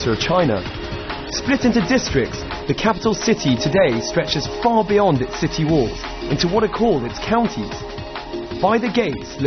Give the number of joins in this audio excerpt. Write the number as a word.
one